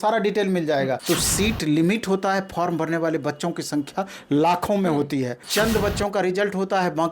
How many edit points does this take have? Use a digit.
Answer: 2